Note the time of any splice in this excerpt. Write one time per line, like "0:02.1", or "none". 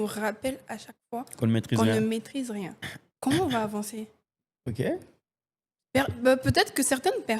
none